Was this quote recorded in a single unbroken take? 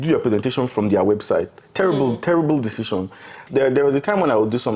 no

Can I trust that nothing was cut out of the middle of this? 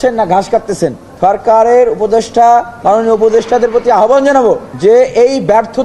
no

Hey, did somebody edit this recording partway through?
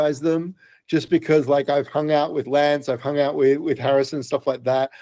no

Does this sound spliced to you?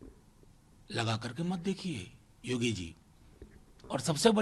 no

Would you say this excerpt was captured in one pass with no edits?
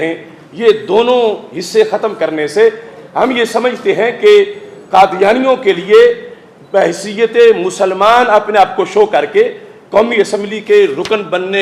yes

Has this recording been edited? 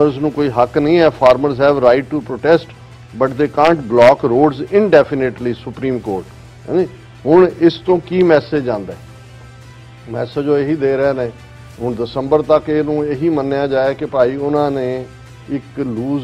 no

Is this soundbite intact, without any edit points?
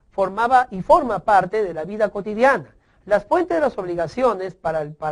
yes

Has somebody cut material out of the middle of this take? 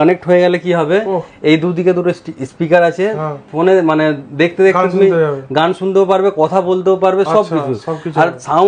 no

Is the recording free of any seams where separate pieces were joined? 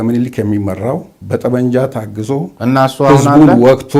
yes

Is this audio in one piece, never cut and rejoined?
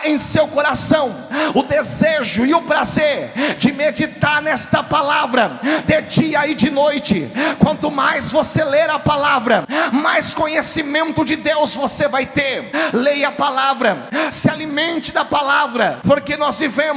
no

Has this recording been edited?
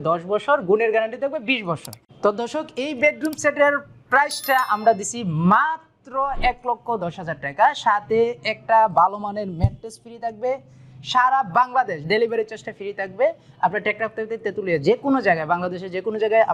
no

